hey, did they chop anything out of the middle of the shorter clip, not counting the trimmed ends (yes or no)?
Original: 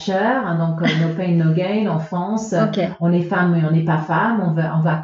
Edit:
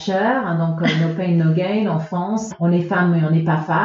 yes